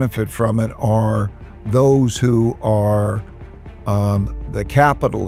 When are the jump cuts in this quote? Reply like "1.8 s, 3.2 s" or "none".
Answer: none